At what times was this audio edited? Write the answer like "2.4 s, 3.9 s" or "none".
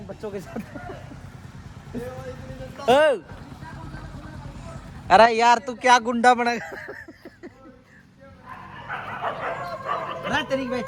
none